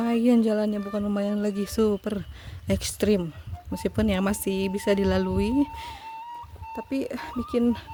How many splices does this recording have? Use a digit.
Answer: 0